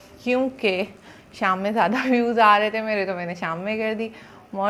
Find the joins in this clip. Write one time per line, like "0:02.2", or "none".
none